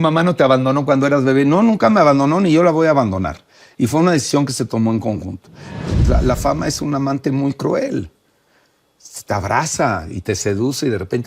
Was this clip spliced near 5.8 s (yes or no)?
yes